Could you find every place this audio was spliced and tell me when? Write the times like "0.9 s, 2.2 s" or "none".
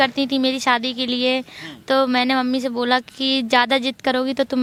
none